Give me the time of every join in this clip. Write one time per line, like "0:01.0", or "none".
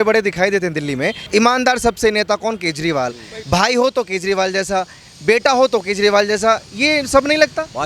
0:01.2